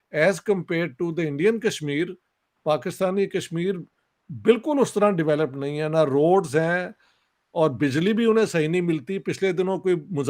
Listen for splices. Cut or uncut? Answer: uncut